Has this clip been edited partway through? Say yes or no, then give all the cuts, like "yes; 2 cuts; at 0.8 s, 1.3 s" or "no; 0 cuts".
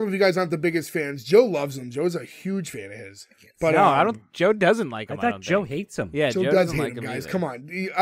no; 0 cuts